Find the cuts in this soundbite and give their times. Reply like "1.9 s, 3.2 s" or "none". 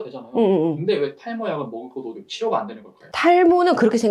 none